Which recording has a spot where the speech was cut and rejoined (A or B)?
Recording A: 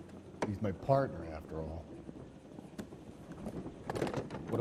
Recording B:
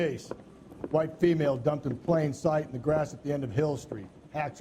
B